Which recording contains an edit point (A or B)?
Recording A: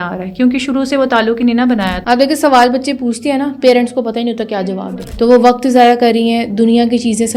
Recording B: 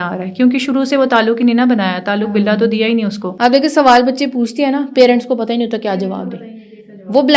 A